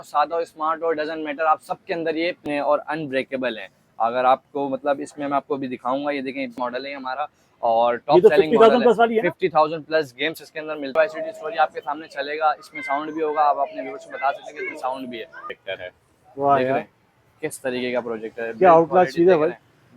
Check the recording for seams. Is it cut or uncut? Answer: cut